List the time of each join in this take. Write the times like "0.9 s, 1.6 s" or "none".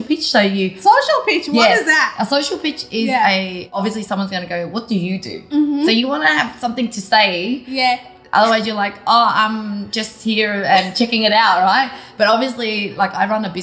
3.8 s